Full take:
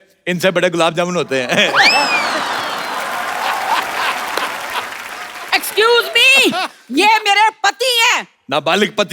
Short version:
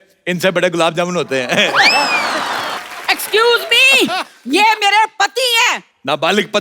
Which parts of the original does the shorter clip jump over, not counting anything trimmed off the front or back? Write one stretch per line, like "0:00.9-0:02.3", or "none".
0:02.8-0:05.2